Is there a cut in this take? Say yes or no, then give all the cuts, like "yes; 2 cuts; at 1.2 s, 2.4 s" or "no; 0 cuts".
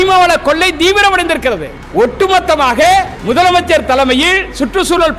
yes; 2 cuts; at 1.7 s, 3.1 s